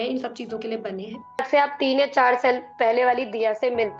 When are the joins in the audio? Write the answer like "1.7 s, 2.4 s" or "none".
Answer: 1.4 s